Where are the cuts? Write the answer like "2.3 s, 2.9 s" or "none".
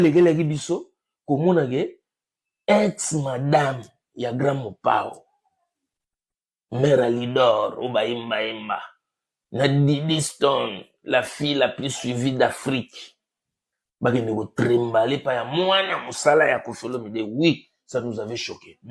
none